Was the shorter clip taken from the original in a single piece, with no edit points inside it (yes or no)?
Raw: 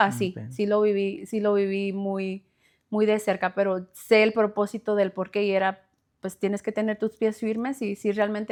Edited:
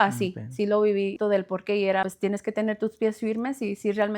no